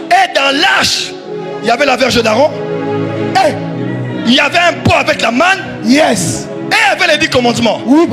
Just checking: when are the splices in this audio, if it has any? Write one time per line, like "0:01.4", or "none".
none